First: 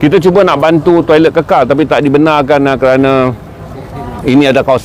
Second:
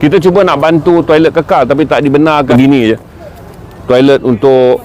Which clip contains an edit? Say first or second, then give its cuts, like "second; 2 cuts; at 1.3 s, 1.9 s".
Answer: second; 1 cut; at 2.5 s